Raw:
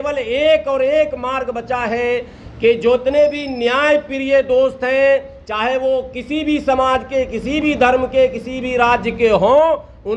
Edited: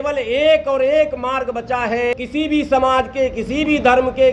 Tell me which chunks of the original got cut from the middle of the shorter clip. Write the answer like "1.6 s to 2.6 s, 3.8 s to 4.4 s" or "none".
2.1 s to 6.1 s